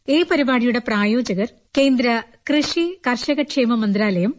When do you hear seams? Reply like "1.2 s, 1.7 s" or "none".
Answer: 1.6 s